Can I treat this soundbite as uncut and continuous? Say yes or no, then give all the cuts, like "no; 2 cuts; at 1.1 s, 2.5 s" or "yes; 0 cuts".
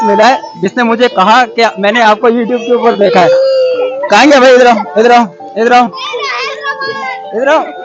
yes; 0 cuts